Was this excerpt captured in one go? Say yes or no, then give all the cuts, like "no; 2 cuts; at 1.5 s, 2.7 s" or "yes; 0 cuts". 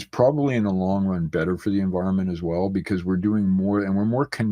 yes; 0 cuts